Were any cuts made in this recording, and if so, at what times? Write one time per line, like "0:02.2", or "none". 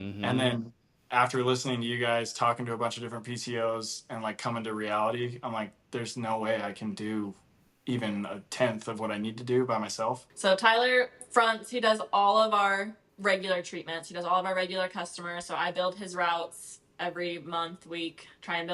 0:10.3
0:13.0